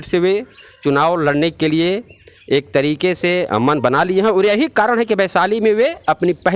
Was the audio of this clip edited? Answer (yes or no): no